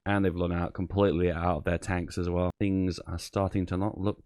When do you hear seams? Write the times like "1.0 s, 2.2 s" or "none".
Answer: 2.5 s